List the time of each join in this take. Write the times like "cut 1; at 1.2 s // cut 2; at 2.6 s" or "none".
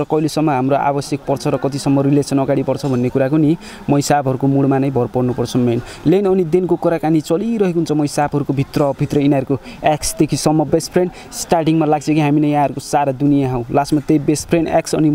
none